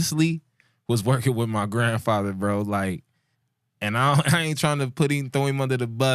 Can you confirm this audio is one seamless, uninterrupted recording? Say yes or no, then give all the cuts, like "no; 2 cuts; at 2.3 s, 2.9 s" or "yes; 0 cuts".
yes; 0 cuts